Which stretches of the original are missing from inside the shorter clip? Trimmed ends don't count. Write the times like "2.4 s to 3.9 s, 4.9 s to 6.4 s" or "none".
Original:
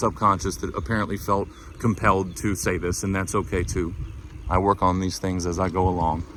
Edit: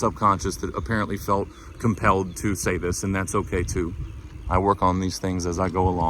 none